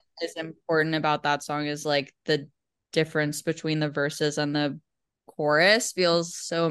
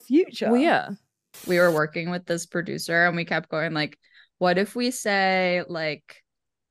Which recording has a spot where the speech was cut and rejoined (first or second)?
second